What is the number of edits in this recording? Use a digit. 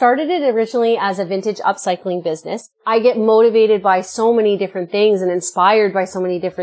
1